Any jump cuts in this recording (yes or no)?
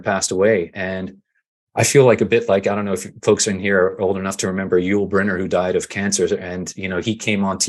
no